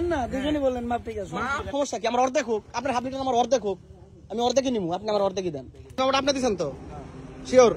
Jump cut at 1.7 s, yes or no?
yes